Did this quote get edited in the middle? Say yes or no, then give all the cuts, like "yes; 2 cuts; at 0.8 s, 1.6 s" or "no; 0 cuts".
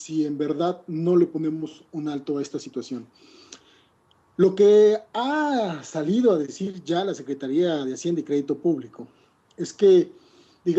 no; 0 cuts